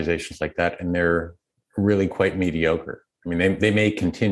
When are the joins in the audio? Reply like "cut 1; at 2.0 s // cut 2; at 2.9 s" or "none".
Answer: none